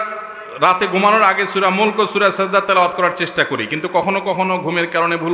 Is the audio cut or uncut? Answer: uncut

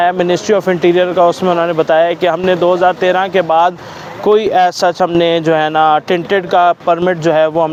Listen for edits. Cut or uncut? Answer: uncut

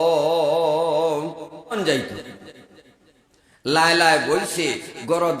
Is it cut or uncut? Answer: cut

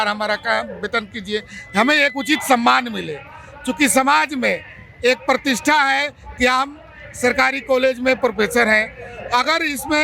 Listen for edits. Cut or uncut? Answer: uncut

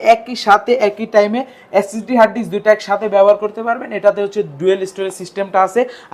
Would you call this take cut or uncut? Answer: uncut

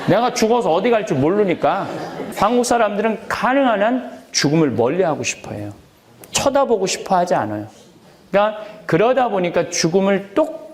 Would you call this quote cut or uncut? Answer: cut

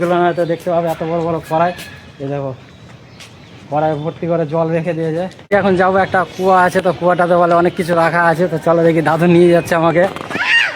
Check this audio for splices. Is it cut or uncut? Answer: cut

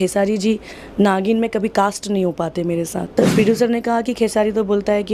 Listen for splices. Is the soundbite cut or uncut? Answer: cut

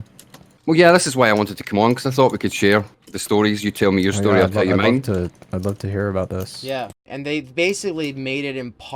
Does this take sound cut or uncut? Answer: cut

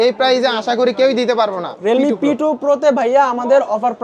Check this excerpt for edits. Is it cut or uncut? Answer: cut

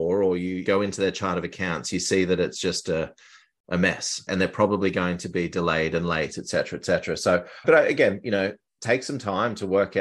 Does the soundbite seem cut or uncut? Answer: uncut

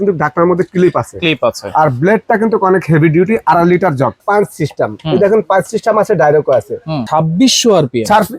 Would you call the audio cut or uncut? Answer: cut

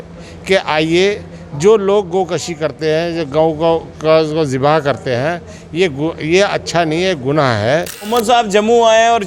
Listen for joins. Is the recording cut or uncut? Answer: cut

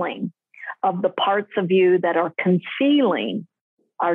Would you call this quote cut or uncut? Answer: uncut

